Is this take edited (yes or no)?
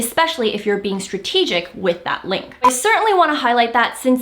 yes